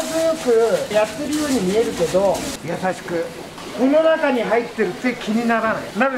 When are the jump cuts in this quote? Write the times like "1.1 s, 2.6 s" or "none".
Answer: none